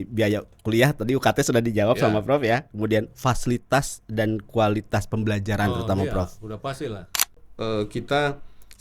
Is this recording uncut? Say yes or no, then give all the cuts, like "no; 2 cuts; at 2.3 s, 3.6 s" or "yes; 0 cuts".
no; 1 cut; at 7.5 s